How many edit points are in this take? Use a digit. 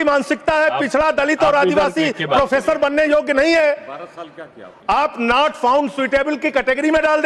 0